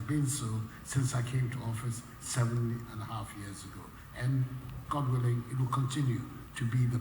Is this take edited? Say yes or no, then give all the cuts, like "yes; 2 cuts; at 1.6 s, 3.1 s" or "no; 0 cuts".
no; 0 cuts